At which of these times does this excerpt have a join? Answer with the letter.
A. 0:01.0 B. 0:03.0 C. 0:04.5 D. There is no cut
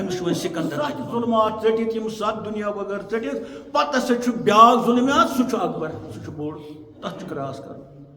A